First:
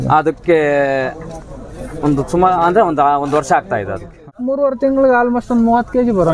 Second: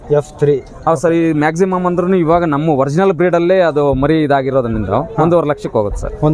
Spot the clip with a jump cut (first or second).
first